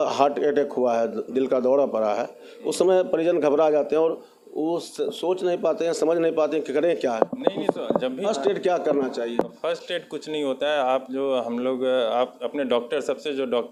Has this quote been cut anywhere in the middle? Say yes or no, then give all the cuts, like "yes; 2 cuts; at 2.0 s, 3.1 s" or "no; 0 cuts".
no; 0 cuts